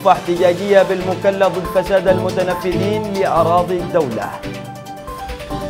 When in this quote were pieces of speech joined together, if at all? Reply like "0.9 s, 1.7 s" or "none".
4.3 s